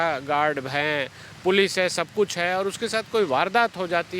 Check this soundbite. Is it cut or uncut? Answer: uncut